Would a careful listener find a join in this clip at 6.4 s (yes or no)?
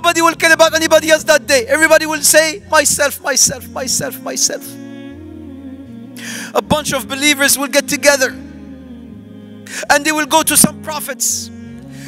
yes